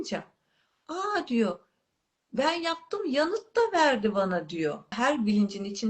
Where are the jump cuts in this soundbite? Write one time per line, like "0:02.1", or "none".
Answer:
0:05.0